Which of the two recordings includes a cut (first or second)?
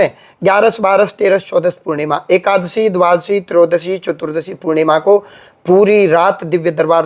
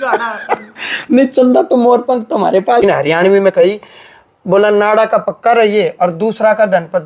second